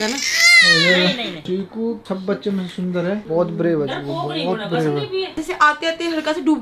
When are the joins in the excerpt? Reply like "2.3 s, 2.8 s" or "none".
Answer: none